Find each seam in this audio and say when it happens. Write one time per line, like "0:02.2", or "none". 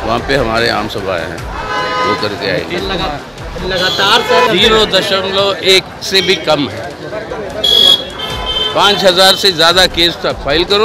0:04.5